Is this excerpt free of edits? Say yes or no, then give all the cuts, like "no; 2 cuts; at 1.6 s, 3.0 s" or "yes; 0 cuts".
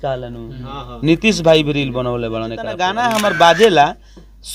no; 1 cut; at 2.8 s